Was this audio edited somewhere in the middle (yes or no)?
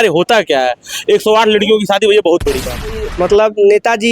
yes